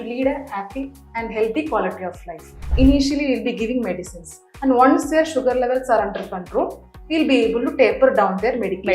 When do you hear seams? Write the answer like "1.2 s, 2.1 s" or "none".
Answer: 2.7 s